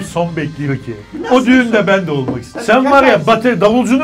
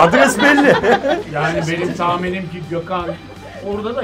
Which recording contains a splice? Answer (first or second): first